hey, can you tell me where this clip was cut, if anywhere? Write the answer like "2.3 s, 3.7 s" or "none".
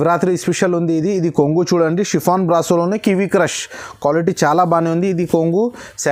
none